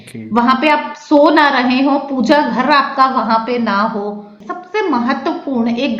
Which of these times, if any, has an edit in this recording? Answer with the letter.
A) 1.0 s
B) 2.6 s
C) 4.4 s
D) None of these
C